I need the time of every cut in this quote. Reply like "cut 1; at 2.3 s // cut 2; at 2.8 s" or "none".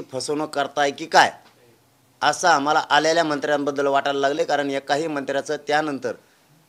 none